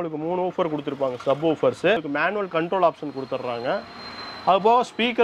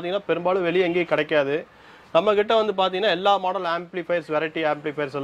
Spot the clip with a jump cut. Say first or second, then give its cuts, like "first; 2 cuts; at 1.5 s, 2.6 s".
first; 1 cut; at 2.1 s